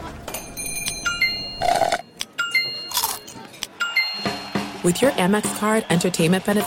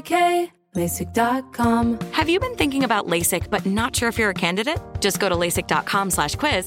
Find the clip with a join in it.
second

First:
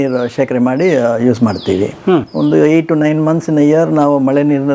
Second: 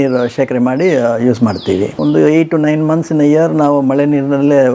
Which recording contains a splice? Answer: second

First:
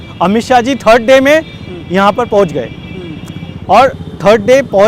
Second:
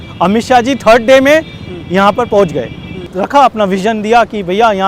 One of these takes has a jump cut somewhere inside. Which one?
second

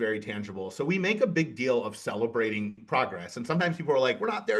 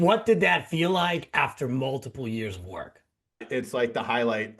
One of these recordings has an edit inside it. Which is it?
second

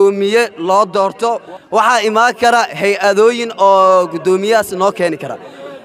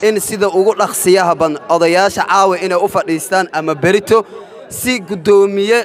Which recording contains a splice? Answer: first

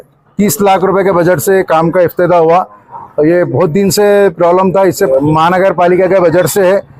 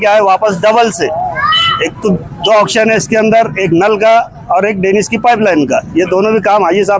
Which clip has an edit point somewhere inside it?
first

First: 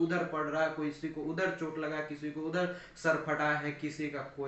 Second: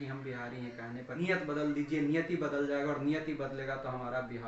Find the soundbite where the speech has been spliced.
second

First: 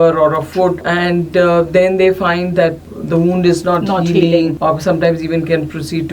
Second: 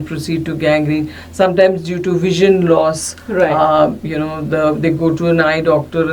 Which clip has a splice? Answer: first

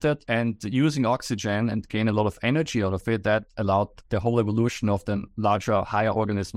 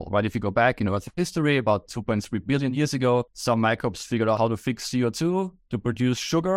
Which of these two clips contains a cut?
second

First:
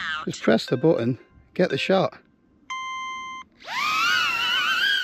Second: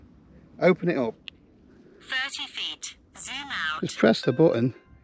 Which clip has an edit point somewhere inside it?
second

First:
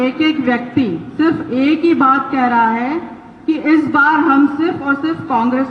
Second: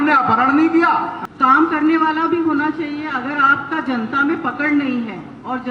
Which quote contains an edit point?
second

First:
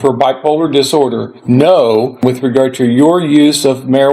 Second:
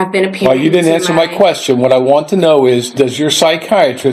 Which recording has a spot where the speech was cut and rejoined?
first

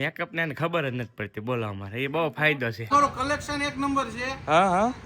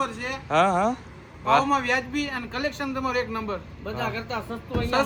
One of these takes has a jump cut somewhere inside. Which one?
first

